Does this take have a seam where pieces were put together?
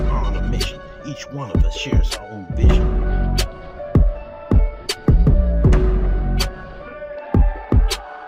no; 0 cuts

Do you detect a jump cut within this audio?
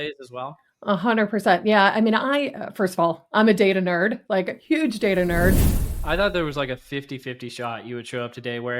yes; 1 cut; at 5.7 s

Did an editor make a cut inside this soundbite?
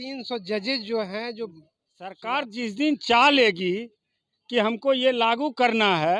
yes; 1 cut; at 2.2 s

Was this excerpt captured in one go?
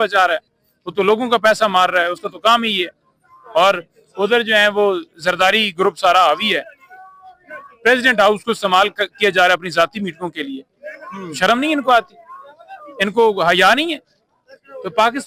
yes; 0 cuts

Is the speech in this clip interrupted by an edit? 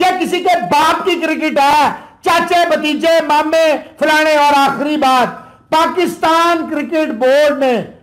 no; 0 cuts

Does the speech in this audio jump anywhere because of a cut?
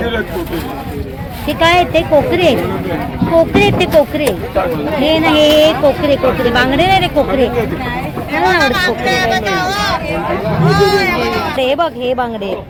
no; 0 cuts

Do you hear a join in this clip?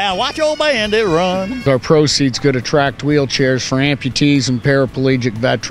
yes; 1 cut; at 1.6 s

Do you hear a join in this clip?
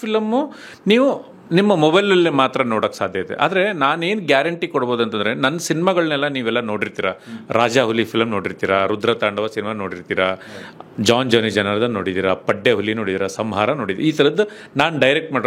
no; 0 cuts

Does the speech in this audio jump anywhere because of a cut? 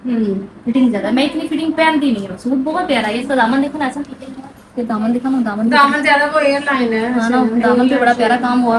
no; 0 cuts

